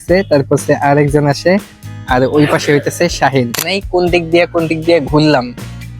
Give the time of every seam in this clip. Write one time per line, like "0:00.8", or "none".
0:03.7